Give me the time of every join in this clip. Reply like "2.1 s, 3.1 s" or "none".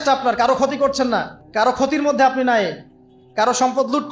1.4 s